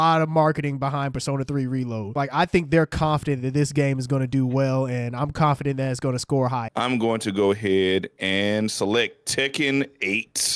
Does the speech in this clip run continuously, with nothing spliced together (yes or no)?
no